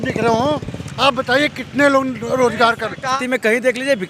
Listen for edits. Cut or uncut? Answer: cut